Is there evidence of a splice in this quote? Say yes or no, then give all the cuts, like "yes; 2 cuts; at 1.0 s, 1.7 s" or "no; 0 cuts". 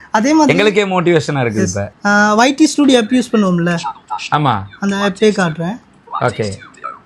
yes; 1 cut; at 1.9 s